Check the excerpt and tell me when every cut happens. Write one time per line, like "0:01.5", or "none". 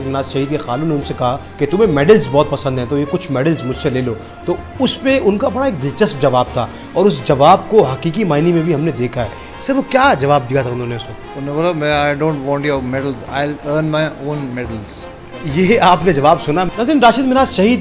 none